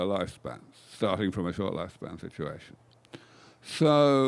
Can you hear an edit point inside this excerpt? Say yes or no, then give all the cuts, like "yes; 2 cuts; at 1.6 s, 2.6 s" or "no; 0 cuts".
no; 0 cuts